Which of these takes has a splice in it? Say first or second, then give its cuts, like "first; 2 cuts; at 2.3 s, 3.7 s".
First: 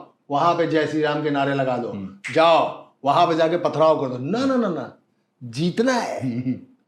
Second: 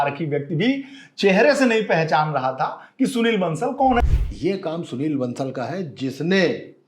second; 1 cut; at 4.0 s